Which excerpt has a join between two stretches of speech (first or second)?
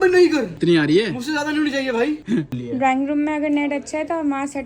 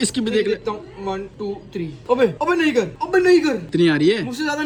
first